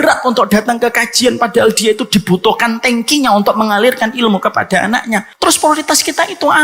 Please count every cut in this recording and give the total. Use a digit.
1